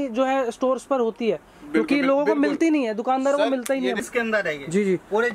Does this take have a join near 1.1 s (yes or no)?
no